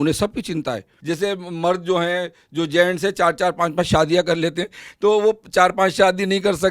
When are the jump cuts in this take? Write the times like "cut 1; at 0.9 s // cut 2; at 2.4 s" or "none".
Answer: cut 1; at 0.9 s